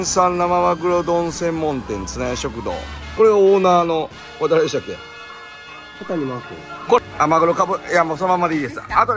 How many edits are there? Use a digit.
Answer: 2